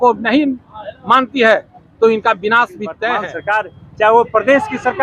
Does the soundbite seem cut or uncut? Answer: cut